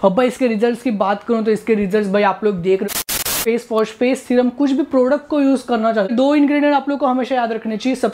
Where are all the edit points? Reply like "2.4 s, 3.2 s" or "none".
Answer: 3.2 s, 6.1 s